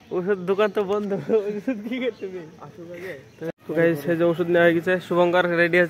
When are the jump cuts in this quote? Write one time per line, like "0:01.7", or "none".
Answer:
0:03.5

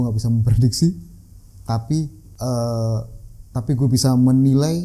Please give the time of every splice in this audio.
0:02.2

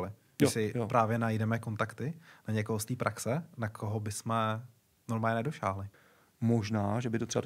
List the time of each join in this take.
0:05.9

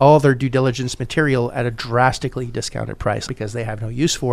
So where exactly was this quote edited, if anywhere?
0:03.3

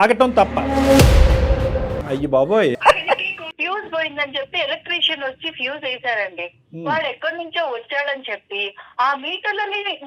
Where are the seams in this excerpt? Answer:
0:01.9
0:03.5

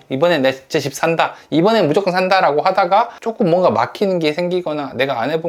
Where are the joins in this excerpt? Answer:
none

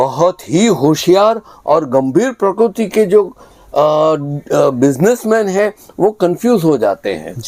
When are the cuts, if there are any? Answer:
none

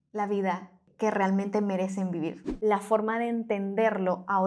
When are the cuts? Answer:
0:00.9
0:02.4

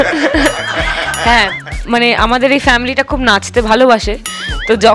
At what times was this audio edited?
0:01.7

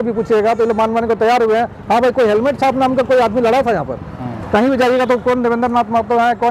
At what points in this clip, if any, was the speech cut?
none

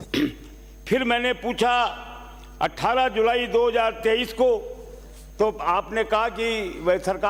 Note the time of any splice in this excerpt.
none

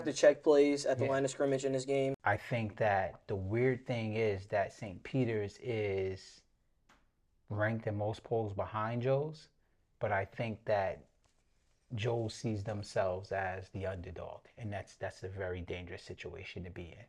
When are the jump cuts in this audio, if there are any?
0:02.2

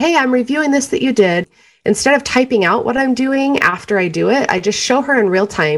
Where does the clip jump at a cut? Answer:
0:01.6

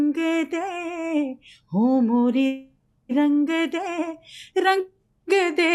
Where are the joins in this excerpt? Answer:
none

